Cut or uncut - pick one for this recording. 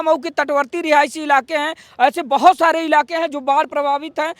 uncut